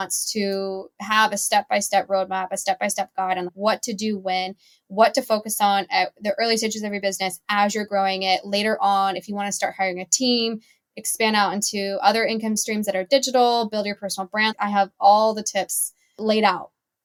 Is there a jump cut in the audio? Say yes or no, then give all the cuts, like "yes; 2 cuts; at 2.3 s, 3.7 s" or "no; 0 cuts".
no; 0 cuts